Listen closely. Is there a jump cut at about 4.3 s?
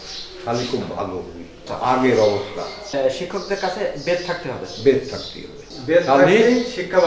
no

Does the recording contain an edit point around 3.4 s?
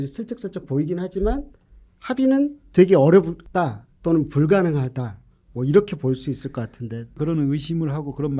yes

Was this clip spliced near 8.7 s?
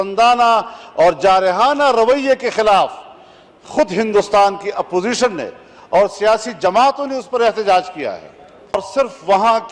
yes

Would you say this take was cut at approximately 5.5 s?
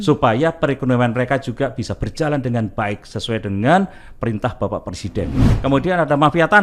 yes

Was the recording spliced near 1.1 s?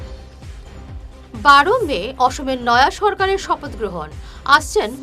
yes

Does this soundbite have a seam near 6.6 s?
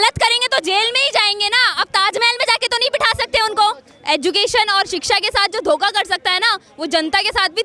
no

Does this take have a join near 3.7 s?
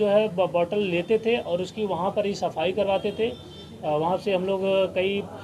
no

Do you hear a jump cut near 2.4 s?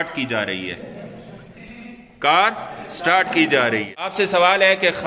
no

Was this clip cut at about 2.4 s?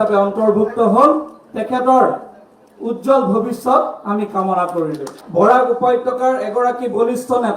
no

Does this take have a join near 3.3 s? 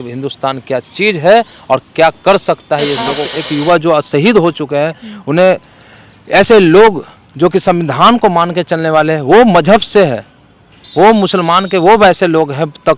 yes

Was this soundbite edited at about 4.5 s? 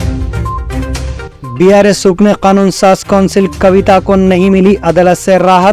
no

